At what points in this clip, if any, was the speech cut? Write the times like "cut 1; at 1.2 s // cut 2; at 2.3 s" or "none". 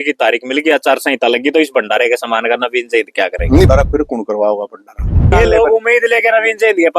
cut 1; at 3.7 s // cut 2; at 5.3 s